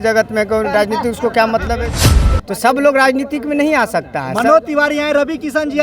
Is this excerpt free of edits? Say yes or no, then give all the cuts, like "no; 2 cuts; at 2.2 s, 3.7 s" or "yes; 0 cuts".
no; 1 cut; at 2.0 s